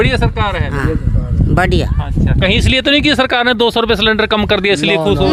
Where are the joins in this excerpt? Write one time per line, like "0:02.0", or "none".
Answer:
none